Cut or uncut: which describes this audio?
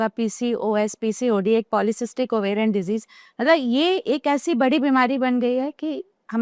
cut